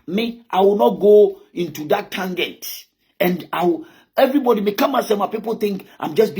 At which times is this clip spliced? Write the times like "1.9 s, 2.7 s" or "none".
none